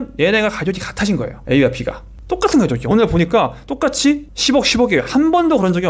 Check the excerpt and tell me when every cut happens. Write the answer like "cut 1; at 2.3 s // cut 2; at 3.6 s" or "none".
none